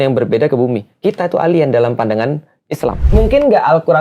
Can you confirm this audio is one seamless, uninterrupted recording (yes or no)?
no